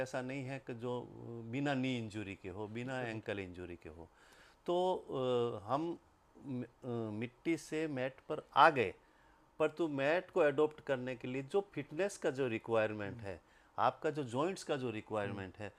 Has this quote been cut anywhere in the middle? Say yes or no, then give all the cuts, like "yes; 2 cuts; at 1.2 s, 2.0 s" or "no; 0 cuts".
no; 0 cuts